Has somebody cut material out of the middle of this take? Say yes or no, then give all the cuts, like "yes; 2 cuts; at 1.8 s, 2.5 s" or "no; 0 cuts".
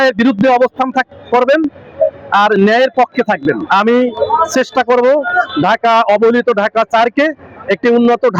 yes; 1 cut; at 3.6 s